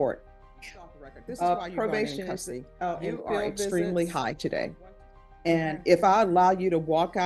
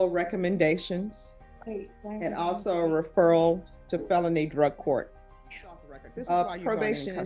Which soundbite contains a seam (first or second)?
first